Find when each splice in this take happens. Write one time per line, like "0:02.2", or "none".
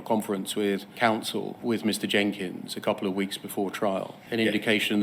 none